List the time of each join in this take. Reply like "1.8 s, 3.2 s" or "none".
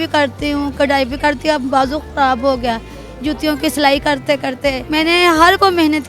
4.8 s